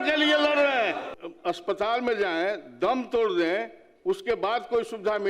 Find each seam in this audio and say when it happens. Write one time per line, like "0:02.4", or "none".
0:01.1